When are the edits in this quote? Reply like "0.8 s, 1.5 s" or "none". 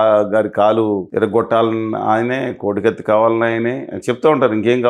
1.1 s